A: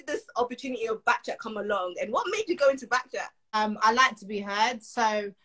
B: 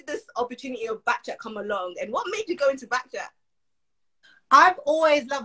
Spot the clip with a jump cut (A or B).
A